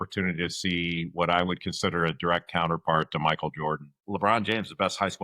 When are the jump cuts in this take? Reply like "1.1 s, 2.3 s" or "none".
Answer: 3.9 s